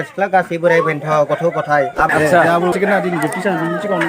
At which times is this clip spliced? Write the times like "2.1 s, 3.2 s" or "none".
2.1 s, 2.7 s